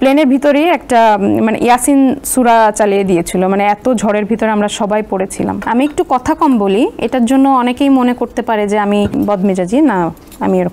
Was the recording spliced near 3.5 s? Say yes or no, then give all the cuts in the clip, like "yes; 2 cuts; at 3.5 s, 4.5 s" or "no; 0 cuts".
no; 2 cuts; at 5.6 s, 9.1 s